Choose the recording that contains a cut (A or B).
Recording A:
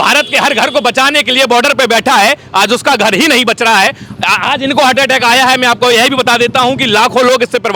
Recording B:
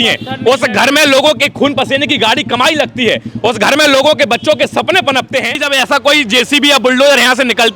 B